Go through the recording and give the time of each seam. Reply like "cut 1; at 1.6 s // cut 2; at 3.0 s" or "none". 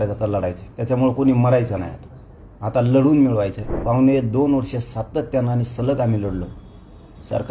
cut 1; at 3.7 s